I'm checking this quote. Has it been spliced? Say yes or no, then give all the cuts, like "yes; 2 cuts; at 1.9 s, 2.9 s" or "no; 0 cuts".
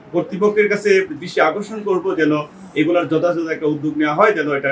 no; 0 cuts